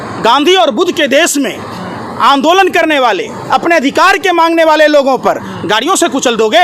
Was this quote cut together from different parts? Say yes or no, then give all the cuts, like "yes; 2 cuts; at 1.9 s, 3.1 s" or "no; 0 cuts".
no; 0 cuts